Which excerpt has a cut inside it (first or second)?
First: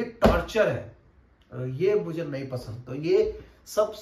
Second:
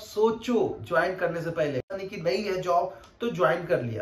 second